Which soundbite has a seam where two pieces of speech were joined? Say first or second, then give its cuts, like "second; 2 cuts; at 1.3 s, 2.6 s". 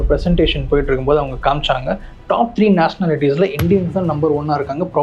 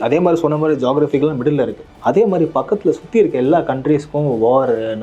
second; 1 cut; at 1.8 s